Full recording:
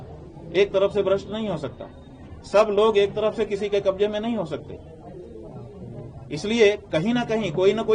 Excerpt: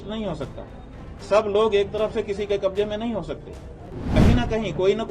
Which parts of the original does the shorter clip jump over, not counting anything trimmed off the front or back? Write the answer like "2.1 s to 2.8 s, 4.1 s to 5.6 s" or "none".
5.3 s to 6.9 s